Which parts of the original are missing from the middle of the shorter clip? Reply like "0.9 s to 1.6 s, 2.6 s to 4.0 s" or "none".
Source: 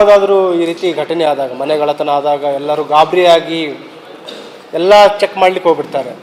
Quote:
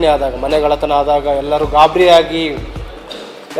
none

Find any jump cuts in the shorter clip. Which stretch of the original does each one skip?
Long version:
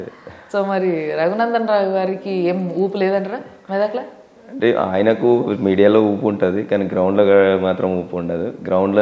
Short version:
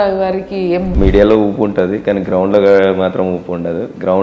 2.7 s to 5.6 s

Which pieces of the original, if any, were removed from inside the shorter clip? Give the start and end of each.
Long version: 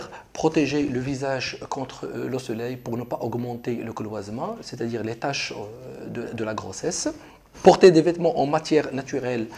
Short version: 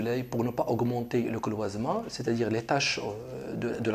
none

